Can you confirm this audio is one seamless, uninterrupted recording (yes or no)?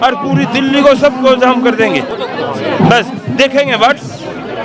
yes